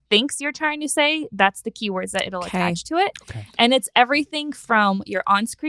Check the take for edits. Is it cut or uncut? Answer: uncut